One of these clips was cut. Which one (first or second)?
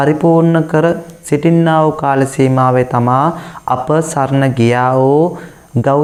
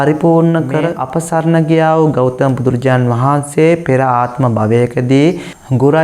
second